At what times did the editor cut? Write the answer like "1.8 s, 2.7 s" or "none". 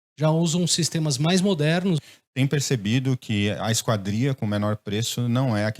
2.1 s